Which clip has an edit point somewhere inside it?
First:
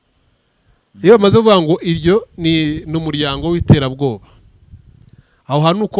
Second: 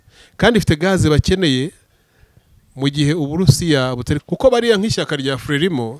second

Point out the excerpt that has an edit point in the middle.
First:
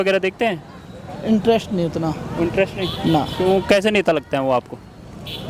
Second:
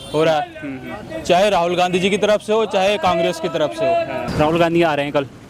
second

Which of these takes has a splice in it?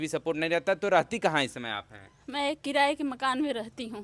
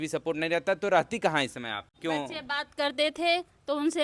second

